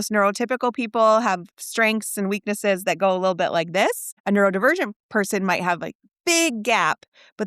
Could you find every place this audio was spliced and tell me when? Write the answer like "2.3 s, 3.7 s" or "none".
4.1 s